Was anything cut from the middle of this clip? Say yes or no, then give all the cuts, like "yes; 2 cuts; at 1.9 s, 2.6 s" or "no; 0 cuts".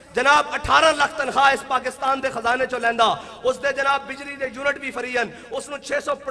no; 0 cuts